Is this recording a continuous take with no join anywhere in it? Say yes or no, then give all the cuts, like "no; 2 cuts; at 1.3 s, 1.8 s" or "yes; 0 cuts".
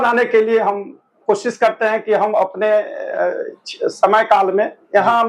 yes; 0 cuts